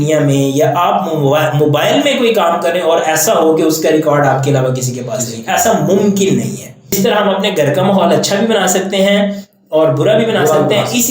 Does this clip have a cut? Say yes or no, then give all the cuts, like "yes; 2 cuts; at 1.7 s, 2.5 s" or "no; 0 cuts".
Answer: yes; 1 cut; at 6.9 s